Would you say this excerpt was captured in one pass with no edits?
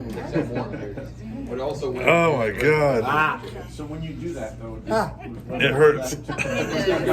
yes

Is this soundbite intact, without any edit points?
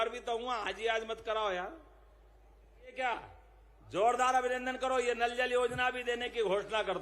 no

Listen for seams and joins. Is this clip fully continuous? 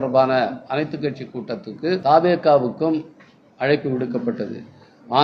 no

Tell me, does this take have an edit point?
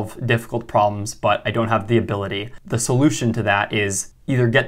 yes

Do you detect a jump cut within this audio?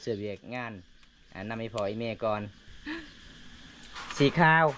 yes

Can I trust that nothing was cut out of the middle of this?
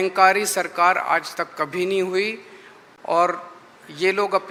yes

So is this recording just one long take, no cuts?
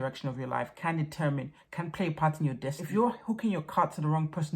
no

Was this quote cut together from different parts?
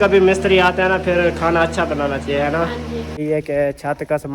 yes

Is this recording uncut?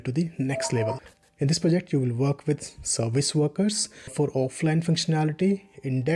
no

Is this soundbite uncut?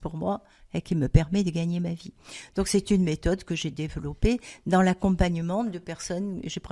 yes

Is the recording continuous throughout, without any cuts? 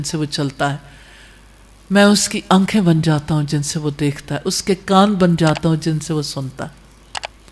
yes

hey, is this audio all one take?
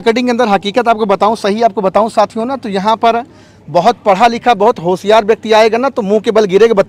yes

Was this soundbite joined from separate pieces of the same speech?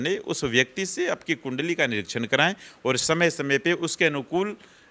no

